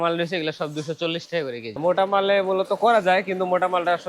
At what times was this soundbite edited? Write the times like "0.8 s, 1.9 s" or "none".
1.7 s